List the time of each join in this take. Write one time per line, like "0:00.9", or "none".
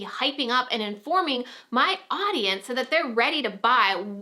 none